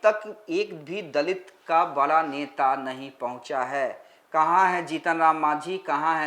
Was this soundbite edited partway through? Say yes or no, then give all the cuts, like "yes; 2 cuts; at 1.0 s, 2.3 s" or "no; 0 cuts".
no; 0 cuts